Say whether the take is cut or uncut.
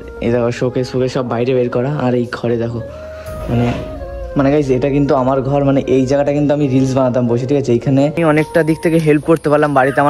cut